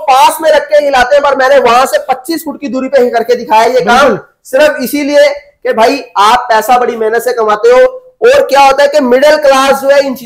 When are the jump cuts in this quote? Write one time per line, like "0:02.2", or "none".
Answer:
none

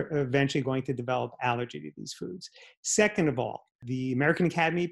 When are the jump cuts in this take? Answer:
0:03.8

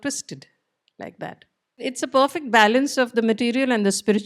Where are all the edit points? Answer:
0:01.8

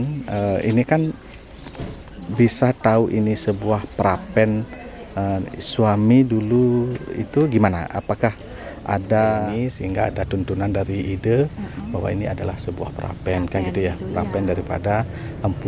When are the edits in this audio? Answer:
0:09.5

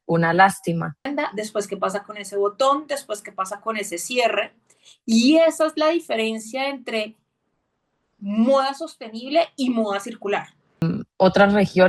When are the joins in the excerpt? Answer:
0:01.1
0:10.9

